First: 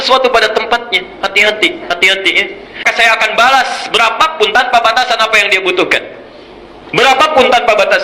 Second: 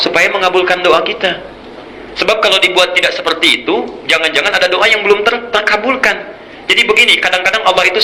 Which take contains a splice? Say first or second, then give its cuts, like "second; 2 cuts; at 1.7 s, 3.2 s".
first; 1 cut; at 2.9 s